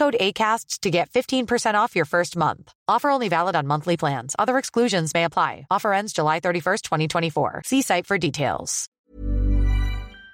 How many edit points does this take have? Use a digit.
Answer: 1